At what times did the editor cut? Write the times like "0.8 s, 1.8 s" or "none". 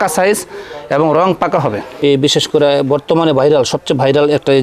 1.9 s